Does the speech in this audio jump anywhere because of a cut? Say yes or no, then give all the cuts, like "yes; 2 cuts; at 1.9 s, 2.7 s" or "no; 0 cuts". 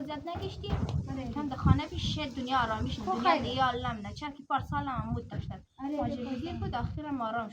no; 0 cuts